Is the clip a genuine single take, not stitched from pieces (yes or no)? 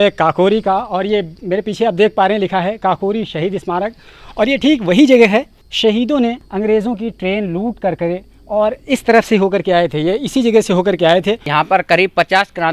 no